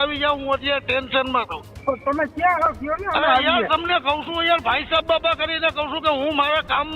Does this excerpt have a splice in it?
yes; 1 cut; at 1.6 s

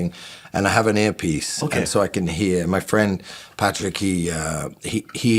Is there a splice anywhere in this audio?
no; 0 cuts

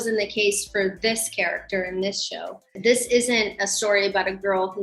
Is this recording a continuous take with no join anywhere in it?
no; 1 cut; at 2.7 s

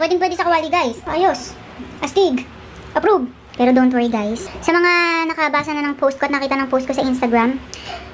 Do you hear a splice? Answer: yes; 2 cuts; at 1.0 s, 3.4 s

